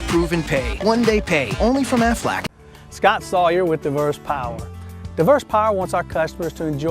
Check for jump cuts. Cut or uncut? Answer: cut